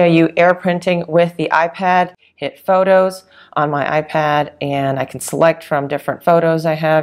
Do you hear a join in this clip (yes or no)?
yes